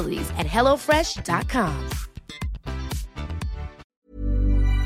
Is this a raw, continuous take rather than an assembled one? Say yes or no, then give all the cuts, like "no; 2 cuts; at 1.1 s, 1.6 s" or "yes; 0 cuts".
no; 1 cut; at 3.8 s